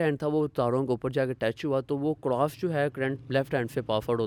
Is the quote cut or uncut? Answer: uncut